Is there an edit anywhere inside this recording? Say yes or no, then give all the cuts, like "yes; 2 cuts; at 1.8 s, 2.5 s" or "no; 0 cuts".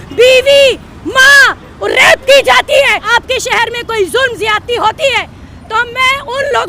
yes; 1 cut; at 3.0 s